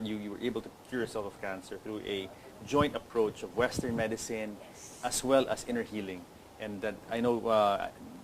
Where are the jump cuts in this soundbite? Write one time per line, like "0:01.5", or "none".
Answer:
0:01.8

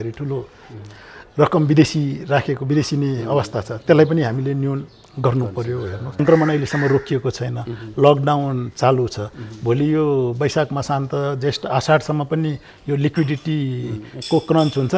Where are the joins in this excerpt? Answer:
0:06.2

